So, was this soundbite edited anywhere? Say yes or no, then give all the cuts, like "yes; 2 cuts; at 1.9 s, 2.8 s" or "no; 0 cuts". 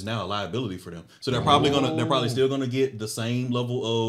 no; 0 cuts